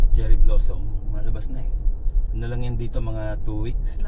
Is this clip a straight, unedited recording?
yes; 0 cuts

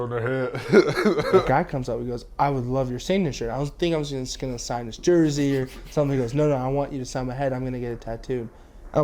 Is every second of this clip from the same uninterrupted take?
no; 1 cut; at 1.4 s

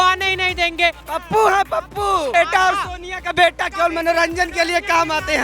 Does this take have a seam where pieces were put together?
yes; 2 cuts; at 1.0 s, 2.3 s

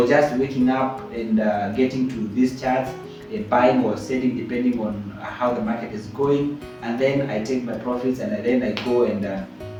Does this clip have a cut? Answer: no; 0 cuts

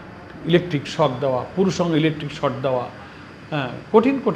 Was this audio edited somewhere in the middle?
no; 0 cuts

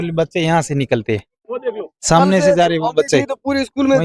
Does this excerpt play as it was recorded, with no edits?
yes; 0 cuts

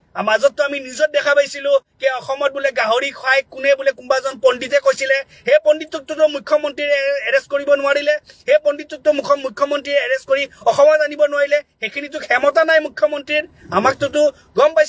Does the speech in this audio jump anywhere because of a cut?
no; 0 cuts

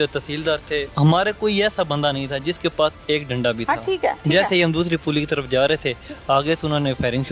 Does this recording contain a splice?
yes; 2 cuts; at 0.9 s, 4.2 s

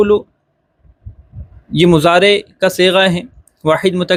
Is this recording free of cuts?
yes; 0 cuts

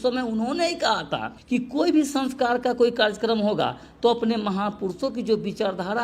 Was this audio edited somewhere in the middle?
no; 0 cuts

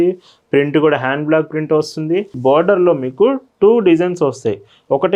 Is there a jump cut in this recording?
yes; 1 cut; at 2.3 s

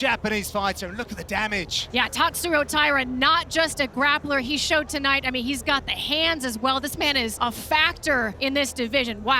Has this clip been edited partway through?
yes; 3 cuts; at 1.8 s, 7.3 s, 8.3 s

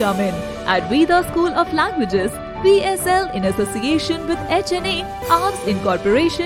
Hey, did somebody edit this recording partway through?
no; 0 cuts

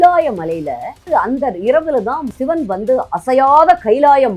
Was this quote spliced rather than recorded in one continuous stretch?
yes; 2 cuts; at 1.0 s, 2.3 s

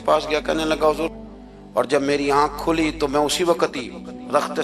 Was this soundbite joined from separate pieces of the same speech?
yes; 1 cut; at 1.1 s

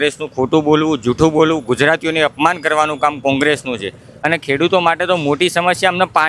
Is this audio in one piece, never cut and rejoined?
no; 1 cut; at 4.1 s

